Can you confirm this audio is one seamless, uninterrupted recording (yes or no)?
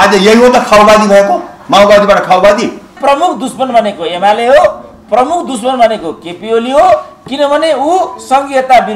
no